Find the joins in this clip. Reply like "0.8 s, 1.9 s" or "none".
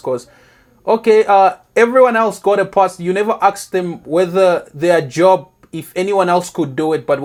none